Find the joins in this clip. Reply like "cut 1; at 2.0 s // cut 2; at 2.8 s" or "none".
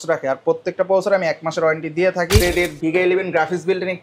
cut 1; at 2.4 s